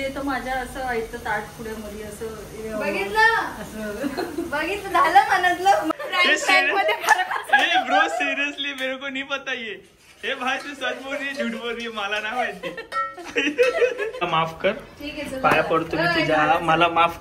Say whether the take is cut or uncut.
cut